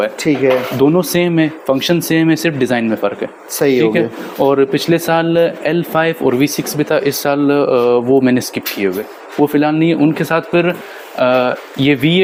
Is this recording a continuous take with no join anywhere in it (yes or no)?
yes